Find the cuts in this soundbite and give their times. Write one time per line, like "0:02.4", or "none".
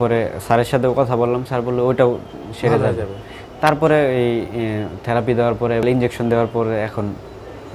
0:05.8